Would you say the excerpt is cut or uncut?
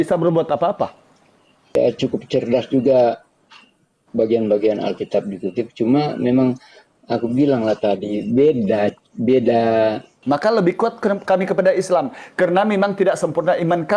cut